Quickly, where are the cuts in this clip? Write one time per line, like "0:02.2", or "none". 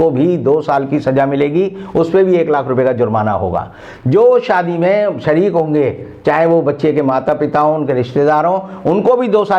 none